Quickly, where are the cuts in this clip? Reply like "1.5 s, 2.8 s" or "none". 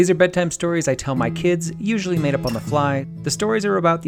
3.1 s